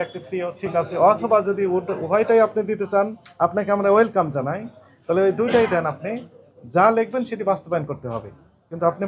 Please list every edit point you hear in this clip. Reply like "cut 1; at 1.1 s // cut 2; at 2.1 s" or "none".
none